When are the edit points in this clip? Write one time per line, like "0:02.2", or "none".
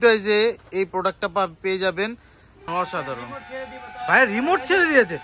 0:02.7

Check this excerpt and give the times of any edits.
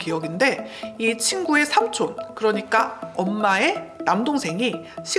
none

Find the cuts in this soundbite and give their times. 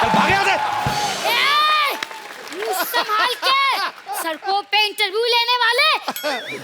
0:01.2
0:04.0

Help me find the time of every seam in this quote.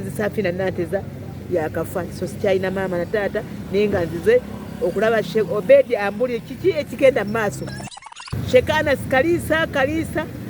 0:08.0

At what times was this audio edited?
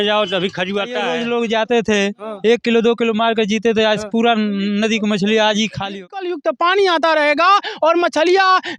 0:01.1
0:06.1

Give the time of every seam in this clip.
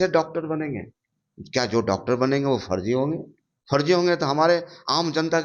none

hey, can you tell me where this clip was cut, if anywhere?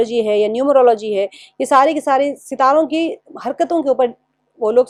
none

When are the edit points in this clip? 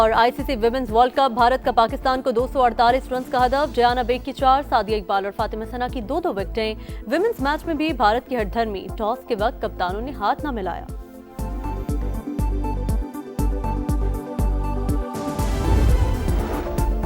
0:16.1

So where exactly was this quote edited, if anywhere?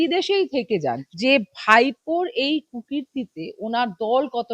0:01.0

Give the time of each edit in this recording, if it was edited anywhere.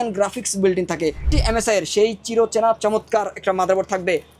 0:01.3

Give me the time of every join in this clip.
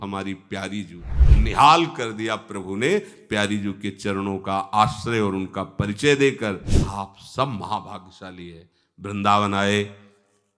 0:06.8

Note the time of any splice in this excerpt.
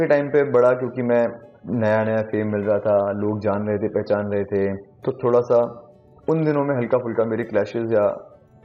0:01.5
0:04.9

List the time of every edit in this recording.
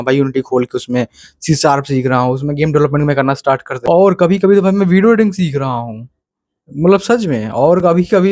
0:03.7

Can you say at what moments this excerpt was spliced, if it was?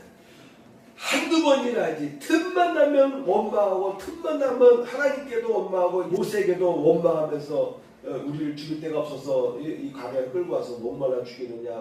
none

